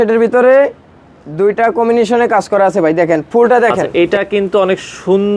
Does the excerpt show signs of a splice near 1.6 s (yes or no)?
no